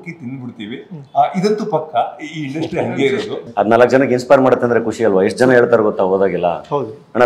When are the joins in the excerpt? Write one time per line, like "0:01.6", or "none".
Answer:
0:03.4